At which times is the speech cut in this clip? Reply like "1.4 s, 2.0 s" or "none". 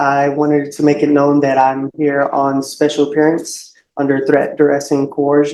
none